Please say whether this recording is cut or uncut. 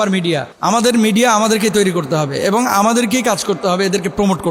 uncut